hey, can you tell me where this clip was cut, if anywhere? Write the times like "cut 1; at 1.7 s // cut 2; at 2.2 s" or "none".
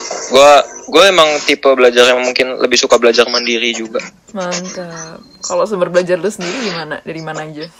none